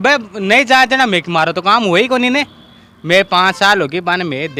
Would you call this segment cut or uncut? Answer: uncut